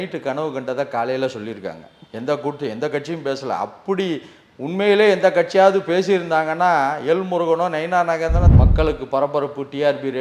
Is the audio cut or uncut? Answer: cut